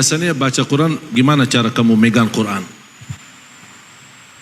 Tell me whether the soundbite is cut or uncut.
cut